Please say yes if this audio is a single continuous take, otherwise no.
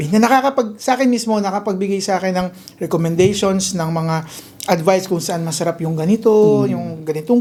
yes